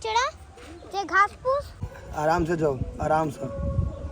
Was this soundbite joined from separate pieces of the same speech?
yes; 1 cut; at 2.0 s

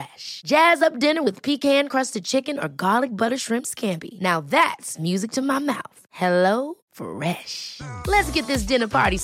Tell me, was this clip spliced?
no; 0 cuts

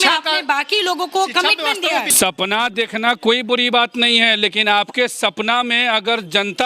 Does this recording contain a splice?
yes; 1 cut; at 2.1 s

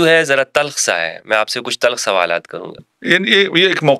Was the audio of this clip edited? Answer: yes; 1 cut; at 2.9 s

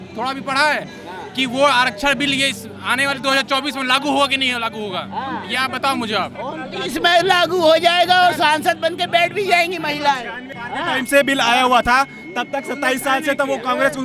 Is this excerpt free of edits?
yes; 0 cuts

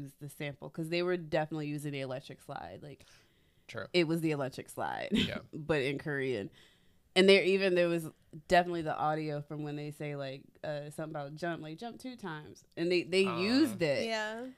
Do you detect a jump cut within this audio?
no; 0 cuts

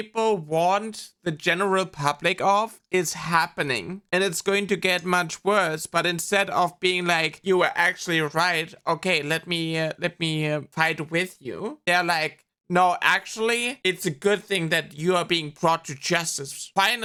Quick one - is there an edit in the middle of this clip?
no; 0 cuts

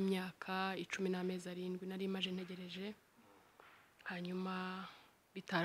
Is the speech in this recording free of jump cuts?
yes; 0 cuts

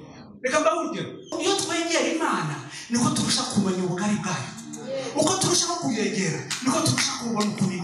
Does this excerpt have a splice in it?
yes; 1 cut; at 1.4 s

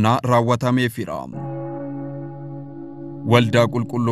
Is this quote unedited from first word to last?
no; 2 cuts; at 1.4 s, 3.2 s

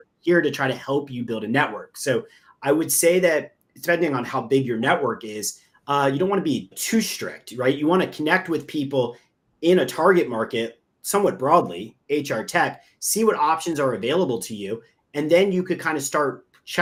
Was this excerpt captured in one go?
yes; 0 cuts

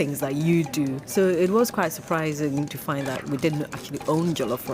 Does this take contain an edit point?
yes; 2 cuts; at 1.0 s, 2.7 s

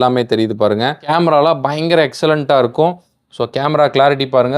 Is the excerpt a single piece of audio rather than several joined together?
no; 1 cut; at 1.0 s

